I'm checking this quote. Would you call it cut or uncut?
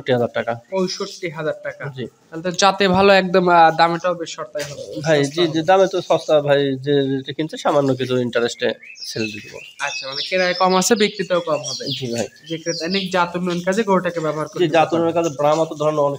uncut